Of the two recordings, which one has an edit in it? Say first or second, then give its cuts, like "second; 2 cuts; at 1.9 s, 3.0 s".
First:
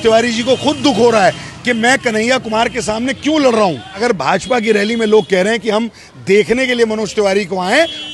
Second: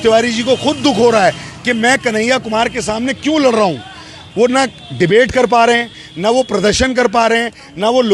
first; 1 cut; at 4.0 s